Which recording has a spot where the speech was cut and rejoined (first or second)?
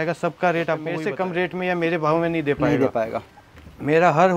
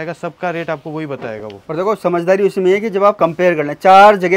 first